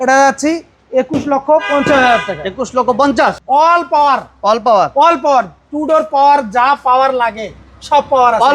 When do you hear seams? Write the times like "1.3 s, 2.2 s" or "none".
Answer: 3.4 s